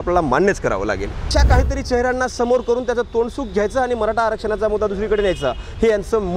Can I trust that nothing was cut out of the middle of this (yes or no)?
no